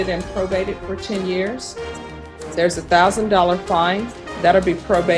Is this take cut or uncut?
uncut